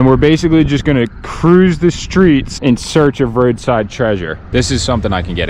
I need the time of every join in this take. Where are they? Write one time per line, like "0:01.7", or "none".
0:02.5
0:04.4

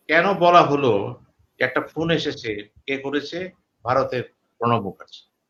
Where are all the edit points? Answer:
none

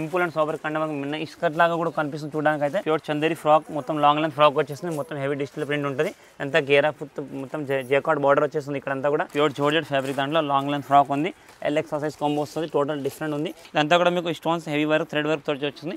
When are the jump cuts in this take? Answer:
0:02.8
0:09.3
0:13.6

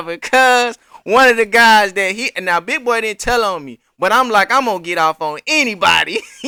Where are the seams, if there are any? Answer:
none

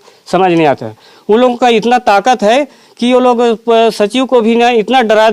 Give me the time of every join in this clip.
none

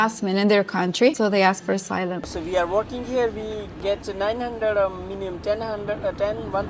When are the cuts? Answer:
0:01.2
0:02.3
0:03.7

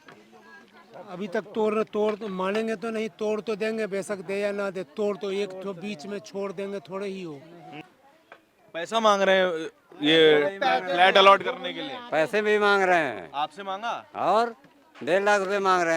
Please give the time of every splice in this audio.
0:07.9

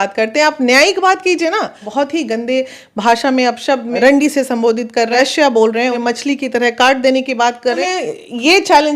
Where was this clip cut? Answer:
0:01.8
0:03.9
0:05.1
0:06.0
0:07.8

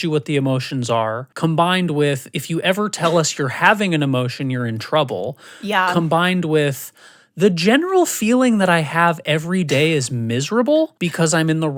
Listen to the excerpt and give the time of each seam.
none

